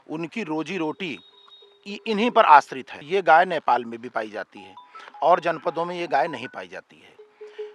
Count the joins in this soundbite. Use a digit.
1